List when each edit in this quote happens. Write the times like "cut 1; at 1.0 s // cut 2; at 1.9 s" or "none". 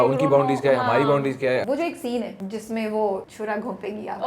cut 1; at 1.6 s // cut 2; at 2.4 s // cut 3; at 3.3 s